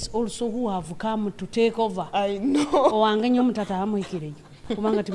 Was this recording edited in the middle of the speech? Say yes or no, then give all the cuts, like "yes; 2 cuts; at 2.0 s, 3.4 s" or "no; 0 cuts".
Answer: no; 0 cuts